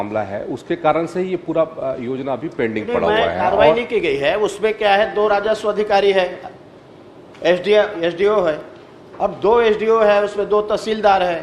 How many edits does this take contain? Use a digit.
0